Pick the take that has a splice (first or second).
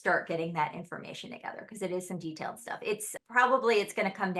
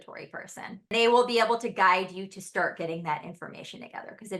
second